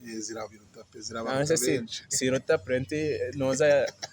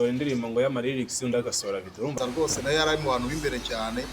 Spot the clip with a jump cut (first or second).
second